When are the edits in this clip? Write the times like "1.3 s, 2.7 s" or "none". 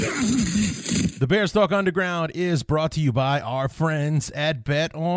1.2 s